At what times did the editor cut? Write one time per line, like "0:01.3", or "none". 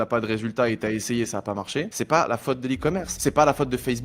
0:01.9
0:03.1